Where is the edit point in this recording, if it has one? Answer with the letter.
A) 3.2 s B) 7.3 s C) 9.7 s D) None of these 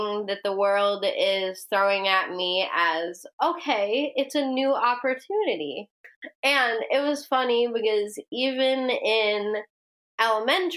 D